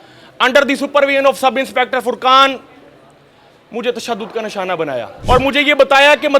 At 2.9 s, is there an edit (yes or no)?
no